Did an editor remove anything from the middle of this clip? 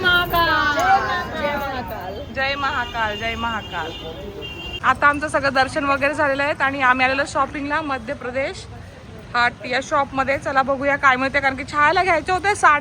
yes; 1 cut; at 4.8 s

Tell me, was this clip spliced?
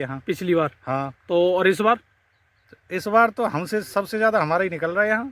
no; 0 cuts

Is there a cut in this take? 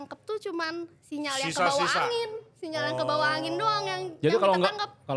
no; 0 cuts

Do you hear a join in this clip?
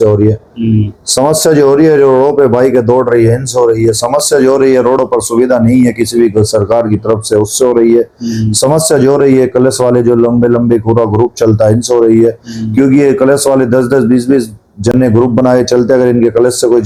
no; 0 cuts

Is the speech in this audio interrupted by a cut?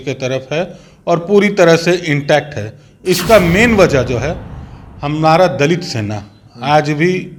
no; 0 cuts

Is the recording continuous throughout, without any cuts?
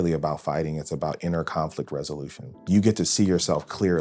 no; 1 cut; at 2.6 s

